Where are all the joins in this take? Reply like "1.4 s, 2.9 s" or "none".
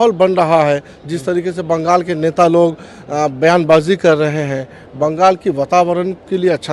none